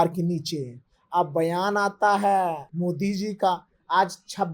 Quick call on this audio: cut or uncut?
cut